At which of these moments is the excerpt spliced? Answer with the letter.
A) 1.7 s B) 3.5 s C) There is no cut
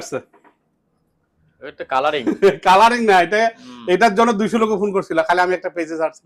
C